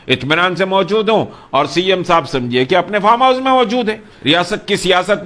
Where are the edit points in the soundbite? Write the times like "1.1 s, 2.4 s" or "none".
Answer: 4.1 s